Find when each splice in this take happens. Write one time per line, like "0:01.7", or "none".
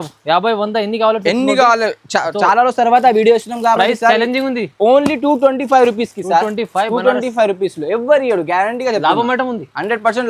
none